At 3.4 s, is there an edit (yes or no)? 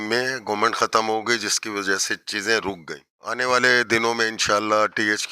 yes